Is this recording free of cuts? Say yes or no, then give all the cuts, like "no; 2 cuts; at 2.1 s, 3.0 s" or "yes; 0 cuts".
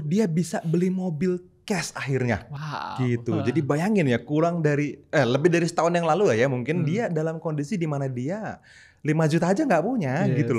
yes; 0 cuts